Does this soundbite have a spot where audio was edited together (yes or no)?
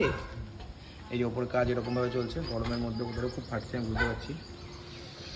no